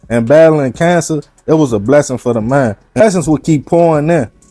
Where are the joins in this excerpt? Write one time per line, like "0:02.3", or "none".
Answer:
0:03.0

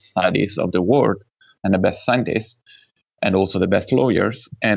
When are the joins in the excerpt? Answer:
none

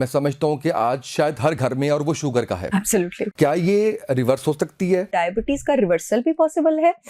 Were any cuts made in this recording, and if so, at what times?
0:03.3
0:05.1

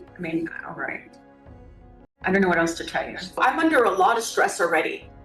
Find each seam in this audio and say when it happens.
0:03.4

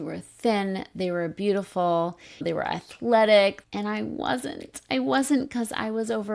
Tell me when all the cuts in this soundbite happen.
0:02.4
0:03.6

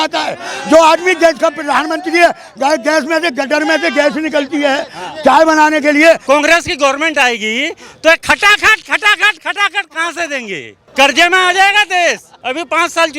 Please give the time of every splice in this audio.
0:06.2
0:10.8
0:12.3

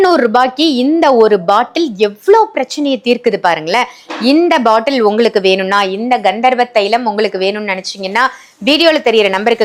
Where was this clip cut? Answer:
none

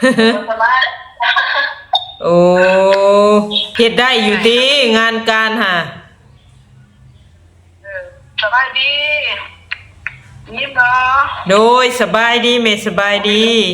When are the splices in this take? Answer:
0:03.6

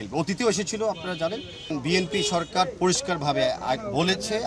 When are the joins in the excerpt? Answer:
0:01.7

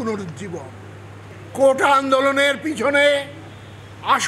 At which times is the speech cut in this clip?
0:01.3

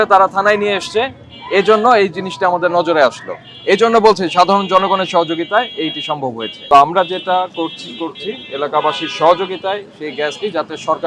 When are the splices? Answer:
0:06.5

